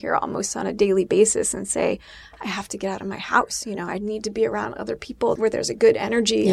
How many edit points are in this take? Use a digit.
1